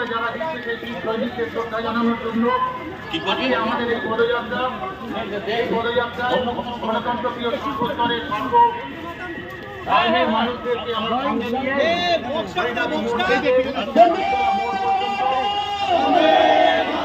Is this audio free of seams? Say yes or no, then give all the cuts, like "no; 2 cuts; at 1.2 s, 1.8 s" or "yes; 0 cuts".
yes; 0 cuts